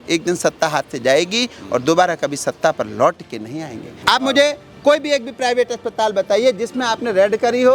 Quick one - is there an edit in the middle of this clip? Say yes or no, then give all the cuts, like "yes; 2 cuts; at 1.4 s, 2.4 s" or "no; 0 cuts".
yes; 1 cut; at 3.9 s